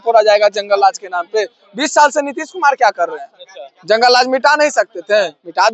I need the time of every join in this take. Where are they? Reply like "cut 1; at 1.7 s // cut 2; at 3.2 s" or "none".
none